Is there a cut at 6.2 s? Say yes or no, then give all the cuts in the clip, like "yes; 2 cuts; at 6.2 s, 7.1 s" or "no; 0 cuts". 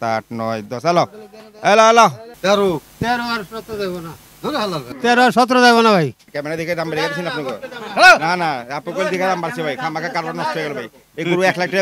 yes; 2 cuts; at 2.3 s, 6.2 s